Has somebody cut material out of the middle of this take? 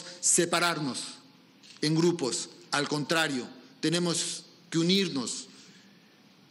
no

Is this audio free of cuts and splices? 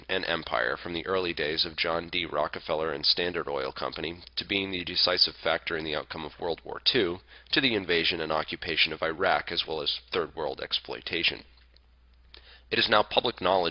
no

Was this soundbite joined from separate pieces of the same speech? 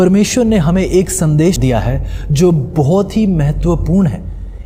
yes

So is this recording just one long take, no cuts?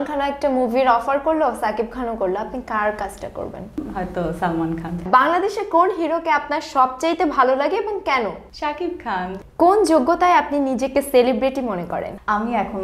no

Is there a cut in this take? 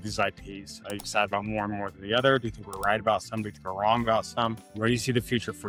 no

